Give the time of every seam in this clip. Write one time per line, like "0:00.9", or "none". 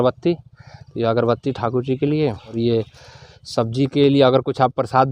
0:02.5